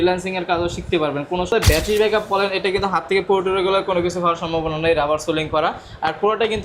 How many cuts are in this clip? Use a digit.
1